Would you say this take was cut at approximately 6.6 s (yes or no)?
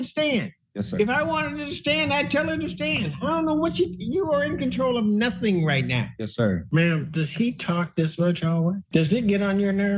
yes